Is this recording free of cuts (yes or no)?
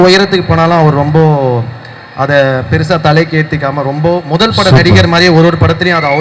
yes